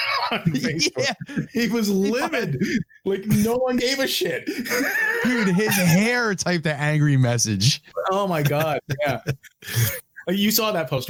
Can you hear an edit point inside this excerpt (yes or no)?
no